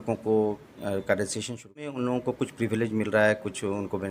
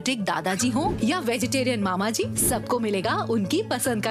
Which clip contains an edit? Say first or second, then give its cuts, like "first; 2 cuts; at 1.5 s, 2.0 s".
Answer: first; 1 cut; at 1.9 s